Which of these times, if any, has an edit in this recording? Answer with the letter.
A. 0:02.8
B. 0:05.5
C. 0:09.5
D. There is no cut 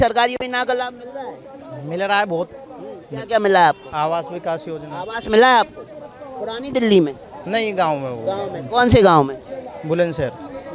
D